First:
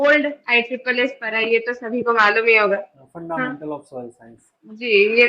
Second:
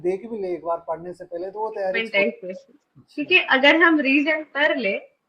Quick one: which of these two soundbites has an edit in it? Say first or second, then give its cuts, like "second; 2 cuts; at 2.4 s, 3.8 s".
second; 1 cut; at 2.0 s